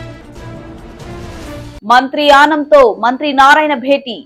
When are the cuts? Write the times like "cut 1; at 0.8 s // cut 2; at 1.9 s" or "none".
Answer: cut 1; at 1.7 s